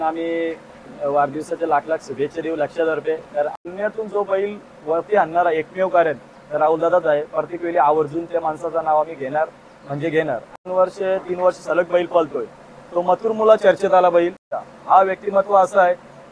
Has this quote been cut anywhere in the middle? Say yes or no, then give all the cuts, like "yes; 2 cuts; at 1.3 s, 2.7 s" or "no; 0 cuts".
yes; 3 cuts; at 3.5 s, 10.7 s, 14.4 s